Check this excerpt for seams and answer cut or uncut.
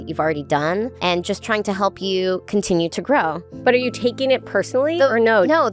cut